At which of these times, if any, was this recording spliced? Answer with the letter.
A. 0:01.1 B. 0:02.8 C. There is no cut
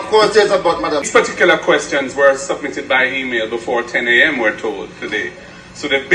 A